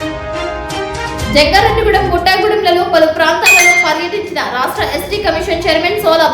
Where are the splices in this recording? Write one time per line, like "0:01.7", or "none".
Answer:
0:01.2